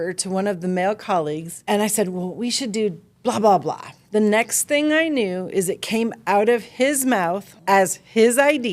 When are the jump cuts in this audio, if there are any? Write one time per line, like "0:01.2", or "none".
0:01.5
0:03.9
0:07.5